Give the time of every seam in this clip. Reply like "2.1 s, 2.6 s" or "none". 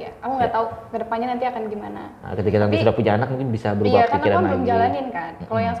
none